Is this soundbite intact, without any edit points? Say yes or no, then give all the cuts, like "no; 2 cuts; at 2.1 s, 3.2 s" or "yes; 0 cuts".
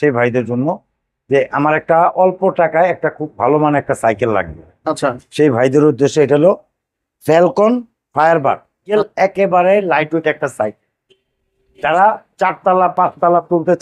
no; 1 cut; at 8.9 s